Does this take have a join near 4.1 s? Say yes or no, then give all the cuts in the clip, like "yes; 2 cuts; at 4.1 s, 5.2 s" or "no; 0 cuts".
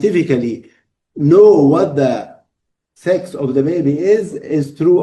no; 0 cuts